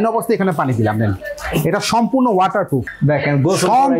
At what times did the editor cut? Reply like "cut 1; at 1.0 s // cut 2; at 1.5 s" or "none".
cut 1; at 2.9 s

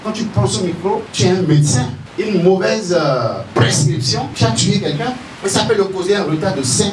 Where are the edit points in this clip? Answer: cut 1; at 1.1 s // cut 2; at 2.0 s // cut 3; at 4.3 s // cut 4; at 5.3 s

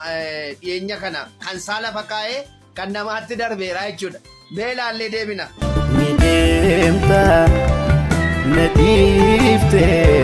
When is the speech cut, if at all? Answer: none

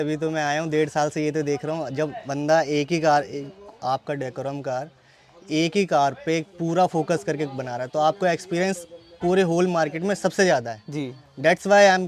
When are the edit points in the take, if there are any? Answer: none

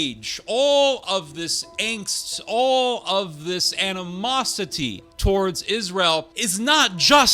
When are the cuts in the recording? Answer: cut 1; at 5.1 s // cut 2; at 6.4 s

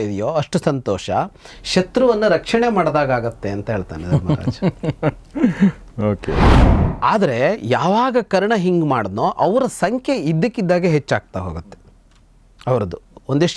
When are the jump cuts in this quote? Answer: cut 1; at 6.6 s

